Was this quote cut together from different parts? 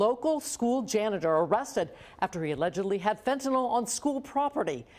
no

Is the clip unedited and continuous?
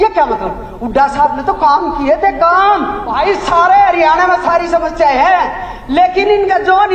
no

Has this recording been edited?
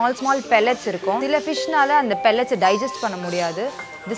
yes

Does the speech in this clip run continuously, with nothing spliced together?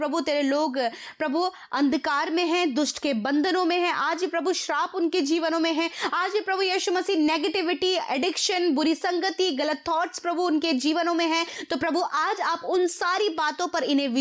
yes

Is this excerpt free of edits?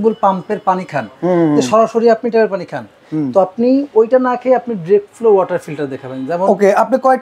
yes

